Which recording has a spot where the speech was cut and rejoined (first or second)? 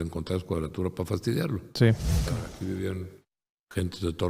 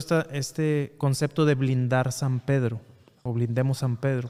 first